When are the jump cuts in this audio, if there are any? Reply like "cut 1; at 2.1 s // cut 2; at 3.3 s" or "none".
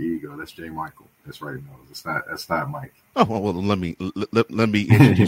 cut 1; at 3.0 s